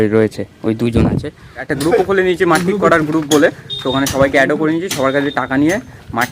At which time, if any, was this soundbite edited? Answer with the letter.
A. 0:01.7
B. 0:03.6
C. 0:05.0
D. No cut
A